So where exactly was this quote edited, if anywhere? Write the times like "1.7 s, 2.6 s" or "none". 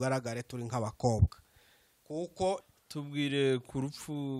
2.7 s